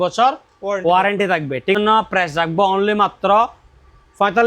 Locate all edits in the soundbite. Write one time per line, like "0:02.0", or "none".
0:01.8